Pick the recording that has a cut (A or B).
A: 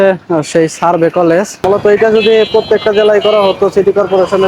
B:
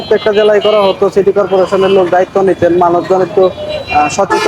A